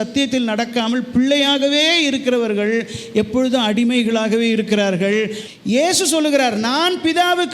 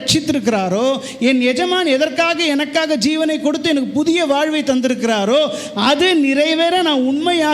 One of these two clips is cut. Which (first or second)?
first